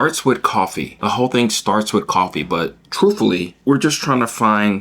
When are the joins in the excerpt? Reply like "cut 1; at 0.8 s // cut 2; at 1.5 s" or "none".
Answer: cut 1; at 0.9 s // cut 2; at 3.5 s